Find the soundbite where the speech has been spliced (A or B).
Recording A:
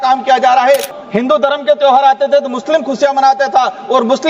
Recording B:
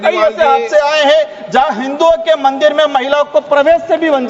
A